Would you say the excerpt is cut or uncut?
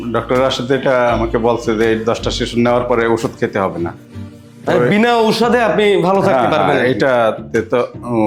uncut